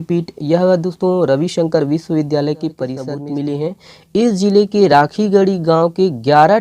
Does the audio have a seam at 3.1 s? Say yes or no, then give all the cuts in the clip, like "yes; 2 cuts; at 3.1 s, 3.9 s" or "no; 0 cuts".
yes; 1 cut; at 3.1 s